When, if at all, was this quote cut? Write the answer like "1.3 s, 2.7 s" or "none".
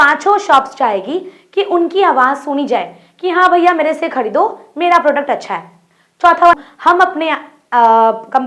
6.5 s